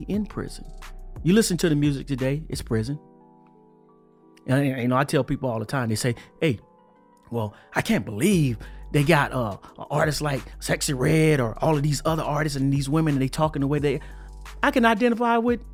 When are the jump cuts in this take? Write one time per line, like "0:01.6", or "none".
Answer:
none